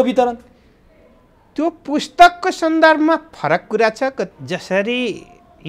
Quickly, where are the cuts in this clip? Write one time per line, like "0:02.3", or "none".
0:04.3